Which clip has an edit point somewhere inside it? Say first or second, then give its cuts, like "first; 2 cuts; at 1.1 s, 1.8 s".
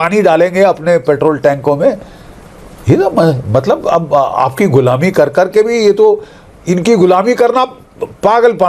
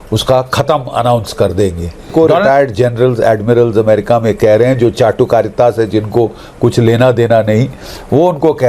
second; 1 cut; at 2.1 s